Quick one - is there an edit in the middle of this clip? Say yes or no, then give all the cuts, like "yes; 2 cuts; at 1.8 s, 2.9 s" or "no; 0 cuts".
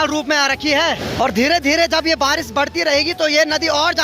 no; 0 cuts